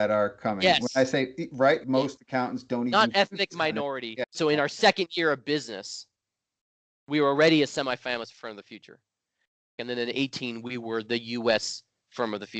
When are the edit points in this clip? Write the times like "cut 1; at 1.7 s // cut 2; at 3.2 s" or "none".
cut 1; at 1.8 s // cut 2; at 4.3 s // cut 3; at 9.8 s